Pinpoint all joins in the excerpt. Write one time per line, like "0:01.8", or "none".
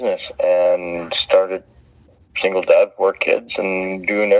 0:02.2